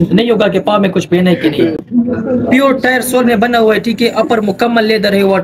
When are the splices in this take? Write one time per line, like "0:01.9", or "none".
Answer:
none